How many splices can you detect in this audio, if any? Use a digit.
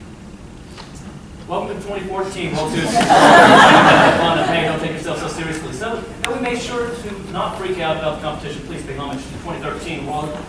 1